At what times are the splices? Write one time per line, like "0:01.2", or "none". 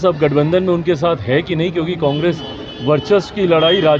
none